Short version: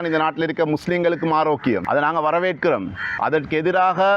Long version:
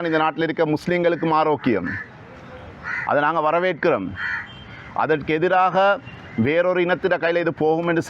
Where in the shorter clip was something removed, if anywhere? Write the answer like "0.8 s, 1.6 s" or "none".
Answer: 1.8 s, 3.0 s

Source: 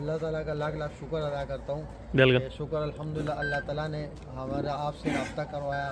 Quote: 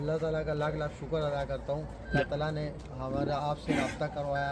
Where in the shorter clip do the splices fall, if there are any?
2.1 s

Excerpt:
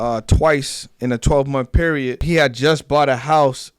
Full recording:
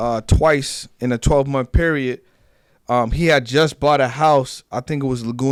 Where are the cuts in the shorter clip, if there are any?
2.2 s

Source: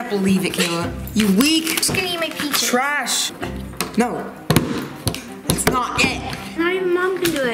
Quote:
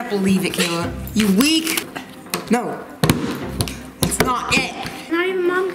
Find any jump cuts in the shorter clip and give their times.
1.8 s

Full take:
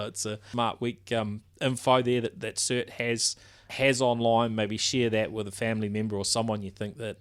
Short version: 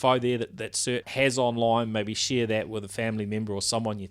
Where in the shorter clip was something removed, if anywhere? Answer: 1.1 s

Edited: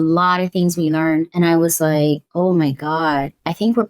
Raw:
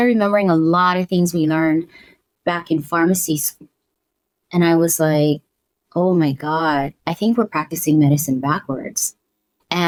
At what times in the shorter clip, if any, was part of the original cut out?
1.3 s, 2.3 s

